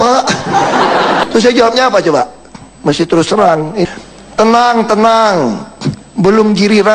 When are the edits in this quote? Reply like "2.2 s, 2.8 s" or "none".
1.2 s